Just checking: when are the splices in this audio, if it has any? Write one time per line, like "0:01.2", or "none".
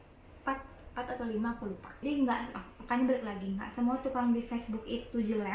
0:02.0